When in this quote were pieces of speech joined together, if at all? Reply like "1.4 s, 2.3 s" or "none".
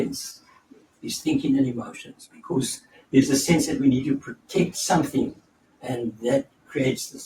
none